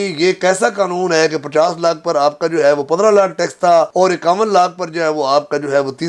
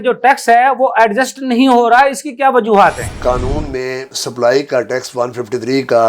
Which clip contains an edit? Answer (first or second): second